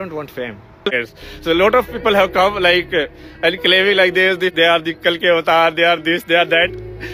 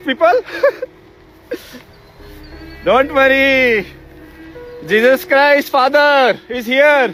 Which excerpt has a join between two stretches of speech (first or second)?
first